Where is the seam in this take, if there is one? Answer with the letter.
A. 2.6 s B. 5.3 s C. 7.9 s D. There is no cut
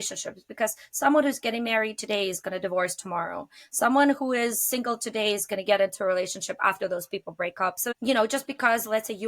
C